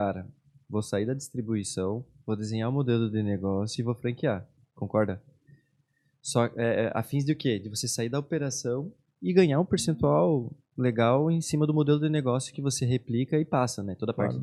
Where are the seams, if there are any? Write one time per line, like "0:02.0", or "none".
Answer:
none